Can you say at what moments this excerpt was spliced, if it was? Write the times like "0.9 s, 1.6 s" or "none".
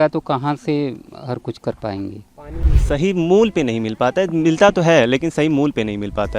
2.6 s